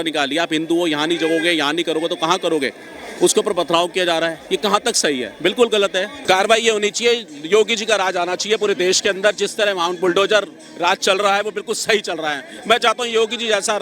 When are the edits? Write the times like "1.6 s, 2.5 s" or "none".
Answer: 6.1 s